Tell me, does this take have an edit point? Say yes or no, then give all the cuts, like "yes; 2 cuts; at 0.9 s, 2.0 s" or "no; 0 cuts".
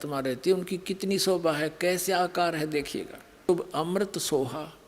yes; 1 cut; at 3.5 s